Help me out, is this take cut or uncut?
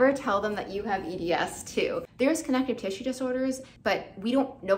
cut